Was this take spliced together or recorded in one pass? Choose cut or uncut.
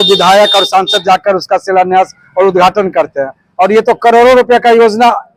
uncut